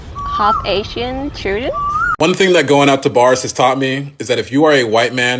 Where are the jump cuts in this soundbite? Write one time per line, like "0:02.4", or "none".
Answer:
0:02.1

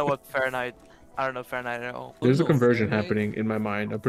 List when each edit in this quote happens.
0:02.2

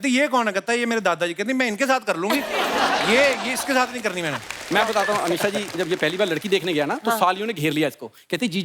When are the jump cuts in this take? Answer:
0:04.5

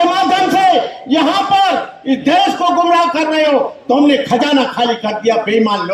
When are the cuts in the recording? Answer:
none

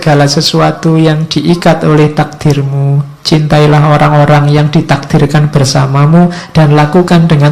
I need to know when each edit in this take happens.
none

